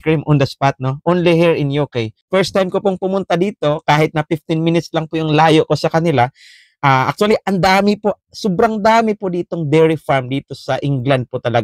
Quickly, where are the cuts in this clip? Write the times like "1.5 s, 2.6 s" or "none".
2.2 s